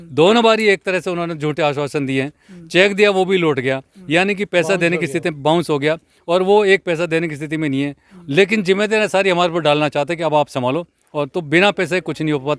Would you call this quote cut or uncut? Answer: uncut